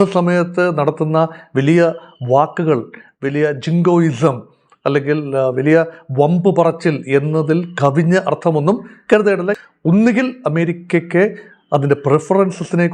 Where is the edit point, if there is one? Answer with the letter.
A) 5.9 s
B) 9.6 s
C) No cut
B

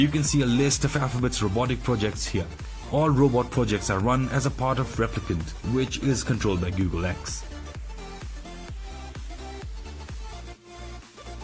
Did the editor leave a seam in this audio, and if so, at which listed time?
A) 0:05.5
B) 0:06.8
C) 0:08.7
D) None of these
D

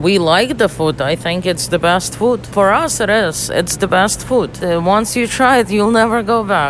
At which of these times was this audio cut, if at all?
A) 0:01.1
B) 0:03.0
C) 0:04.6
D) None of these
C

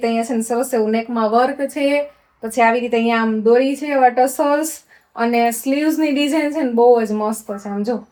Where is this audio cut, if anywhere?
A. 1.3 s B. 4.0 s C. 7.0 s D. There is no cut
D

